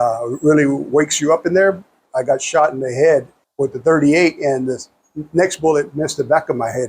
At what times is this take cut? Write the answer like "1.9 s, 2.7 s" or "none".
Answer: 2.0 s, 3.4 s